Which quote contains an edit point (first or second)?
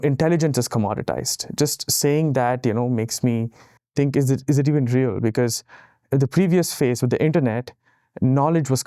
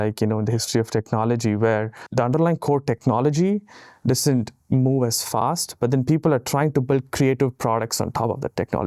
second